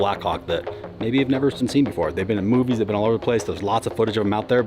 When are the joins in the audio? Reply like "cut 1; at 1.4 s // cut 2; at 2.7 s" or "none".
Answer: cut 1; at 1.6 s

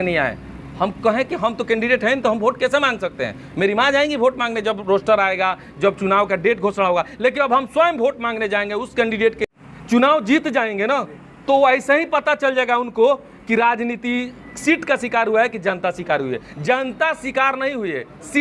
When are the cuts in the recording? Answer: cut 1; at 9.5 s

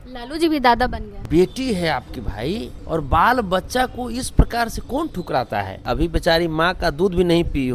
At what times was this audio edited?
cut 1; at 1.2 s // cut 2; at 2.8 s // cut 3; at 5.8 s

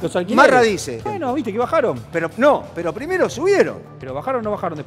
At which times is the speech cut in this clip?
cut 1; at 1.0 s // cut 2; at 4.0 s

